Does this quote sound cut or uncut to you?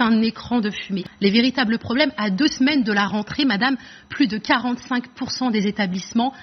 cut